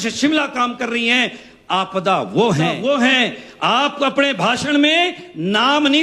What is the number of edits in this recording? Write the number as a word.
one